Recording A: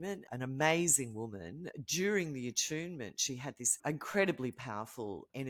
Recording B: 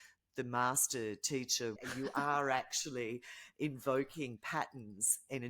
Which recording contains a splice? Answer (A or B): B